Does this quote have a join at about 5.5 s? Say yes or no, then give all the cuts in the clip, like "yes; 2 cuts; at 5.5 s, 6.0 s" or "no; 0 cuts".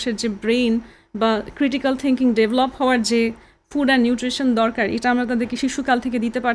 yes; 1 cut; at 5.5 s